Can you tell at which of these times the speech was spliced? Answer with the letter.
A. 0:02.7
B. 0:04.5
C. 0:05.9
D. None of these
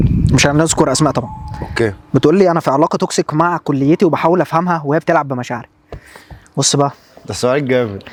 D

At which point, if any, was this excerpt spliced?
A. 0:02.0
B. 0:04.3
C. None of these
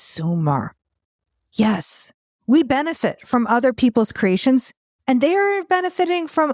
A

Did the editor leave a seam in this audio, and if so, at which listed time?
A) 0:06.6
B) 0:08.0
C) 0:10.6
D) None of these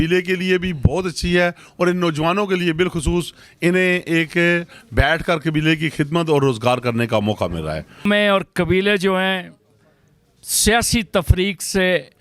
B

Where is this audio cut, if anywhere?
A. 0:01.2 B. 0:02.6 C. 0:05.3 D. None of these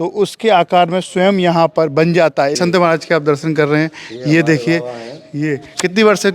B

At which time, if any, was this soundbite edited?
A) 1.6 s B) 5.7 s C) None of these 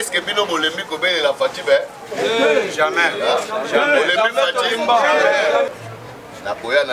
B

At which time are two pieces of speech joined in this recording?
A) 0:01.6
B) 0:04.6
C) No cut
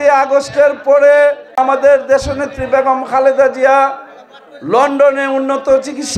A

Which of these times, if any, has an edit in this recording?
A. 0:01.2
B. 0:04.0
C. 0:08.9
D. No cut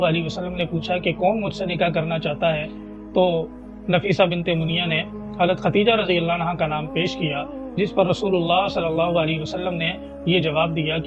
D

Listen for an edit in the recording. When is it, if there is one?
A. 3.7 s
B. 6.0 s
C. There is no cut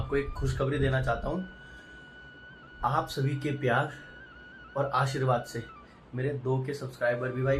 C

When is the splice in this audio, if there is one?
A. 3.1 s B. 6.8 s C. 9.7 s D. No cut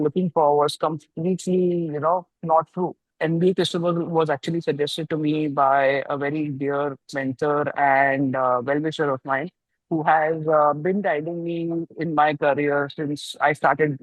A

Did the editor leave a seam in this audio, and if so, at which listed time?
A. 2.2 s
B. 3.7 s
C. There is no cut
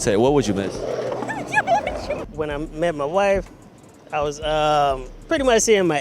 A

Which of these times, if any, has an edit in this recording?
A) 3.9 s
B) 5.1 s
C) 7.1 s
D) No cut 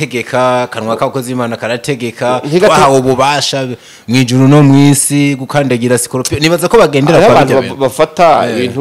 D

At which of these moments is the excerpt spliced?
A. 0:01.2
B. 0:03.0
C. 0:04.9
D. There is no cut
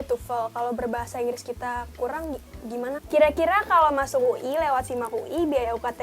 B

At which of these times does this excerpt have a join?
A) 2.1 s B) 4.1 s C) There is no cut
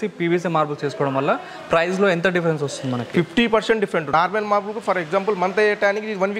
B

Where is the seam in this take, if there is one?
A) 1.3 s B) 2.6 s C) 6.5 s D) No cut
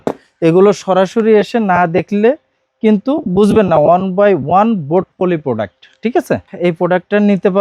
C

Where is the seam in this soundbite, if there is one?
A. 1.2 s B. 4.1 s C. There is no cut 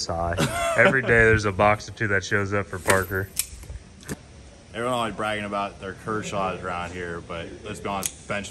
B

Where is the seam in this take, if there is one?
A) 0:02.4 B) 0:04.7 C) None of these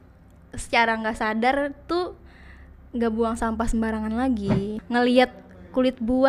B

